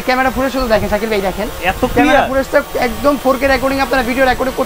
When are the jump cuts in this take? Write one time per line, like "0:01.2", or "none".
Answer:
none